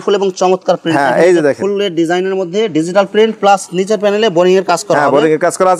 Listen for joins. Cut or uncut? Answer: uncut